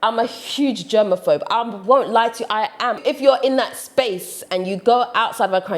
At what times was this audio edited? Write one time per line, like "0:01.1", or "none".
0:03.0